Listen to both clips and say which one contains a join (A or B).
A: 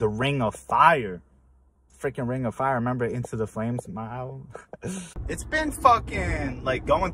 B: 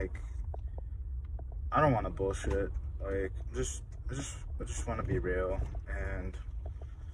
A